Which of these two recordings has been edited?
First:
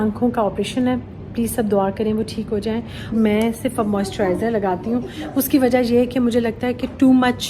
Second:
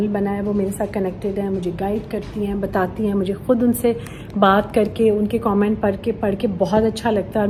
first; 1 cut; at 3.1 s

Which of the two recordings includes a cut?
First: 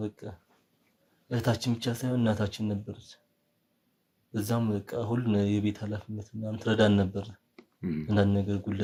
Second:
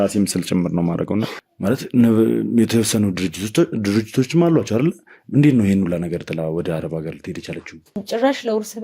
second; 2 cuts; at 1.4 s, 8.0 s

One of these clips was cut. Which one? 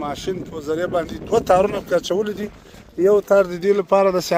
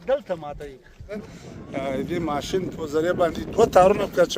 second; 1 cut; at 1.2 s

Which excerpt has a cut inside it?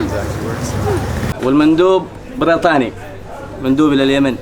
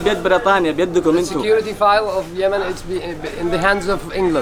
first; 1 cut; at 1.3 s

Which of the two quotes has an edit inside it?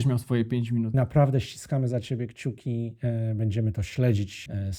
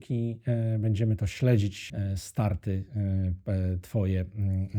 first; 1 cut; at 0.9 s

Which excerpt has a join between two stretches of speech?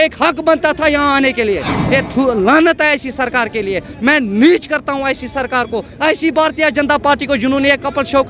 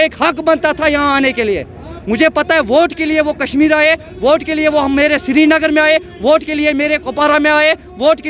first; 1 cut; at 1.8 s

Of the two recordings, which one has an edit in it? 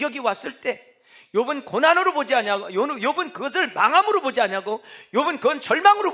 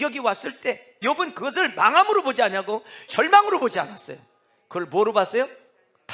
second; 2 cuts; at 1.0 s, 3.1 s

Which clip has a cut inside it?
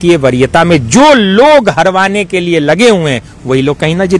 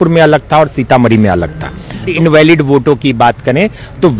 second; 1 cut; at 2.1 s

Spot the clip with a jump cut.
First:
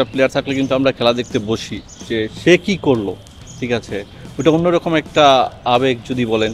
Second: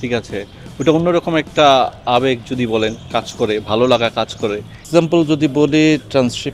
second; 1 cut; at 4.8 s

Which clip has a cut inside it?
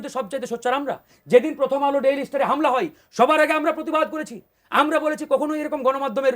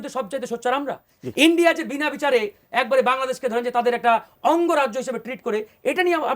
second; 1 cut; at 1.1 s

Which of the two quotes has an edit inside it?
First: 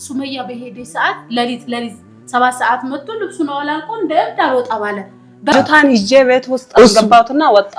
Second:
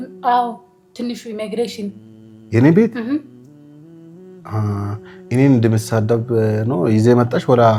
first; 1 cut; at 5.5 s

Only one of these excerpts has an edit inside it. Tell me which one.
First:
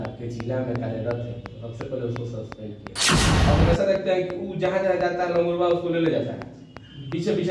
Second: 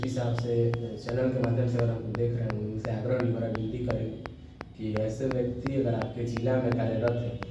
first; 1 cut; at 3.3 s

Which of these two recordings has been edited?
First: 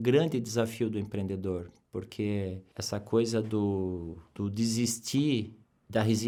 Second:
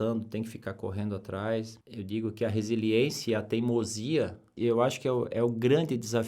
second; 2 cuts; at 1.8 s, 4.4 s

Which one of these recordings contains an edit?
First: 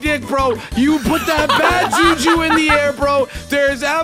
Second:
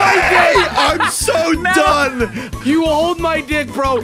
second; 1 cut; at 2.5 s

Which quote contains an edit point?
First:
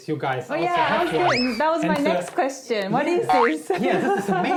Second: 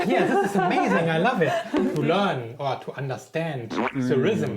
second; 1 cut; at 1.9 s

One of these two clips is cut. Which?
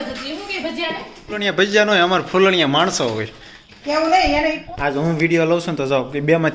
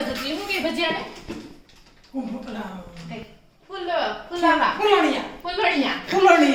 first; 2 cuts; at 1.6 s, 4.6 s

